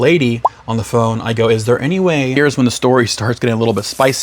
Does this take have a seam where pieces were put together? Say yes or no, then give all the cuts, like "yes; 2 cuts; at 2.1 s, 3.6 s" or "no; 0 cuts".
yes; 1 cut; at 2.4 s